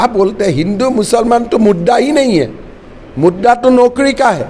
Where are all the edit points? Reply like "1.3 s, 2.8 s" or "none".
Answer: none